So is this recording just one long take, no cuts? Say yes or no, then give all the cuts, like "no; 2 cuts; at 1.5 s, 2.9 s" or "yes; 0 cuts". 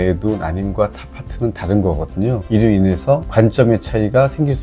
yes; 0 cuts